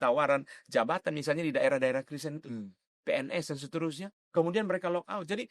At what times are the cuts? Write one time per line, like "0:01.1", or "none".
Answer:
none